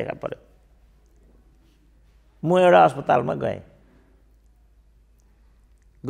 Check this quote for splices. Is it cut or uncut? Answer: uncut